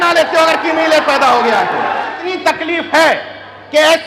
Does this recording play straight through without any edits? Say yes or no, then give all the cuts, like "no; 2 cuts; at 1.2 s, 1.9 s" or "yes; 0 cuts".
no; 1 cut; at 2.2 s